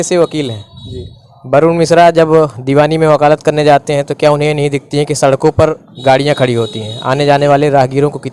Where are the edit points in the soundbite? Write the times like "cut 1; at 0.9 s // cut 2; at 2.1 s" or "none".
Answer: none